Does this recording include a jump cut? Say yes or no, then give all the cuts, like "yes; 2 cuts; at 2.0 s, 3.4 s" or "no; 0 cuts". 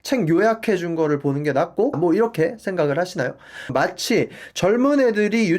yes; 2 cuts; at 2.0 s, 3.7 s